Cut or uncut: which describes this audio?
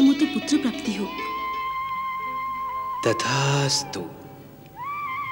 cut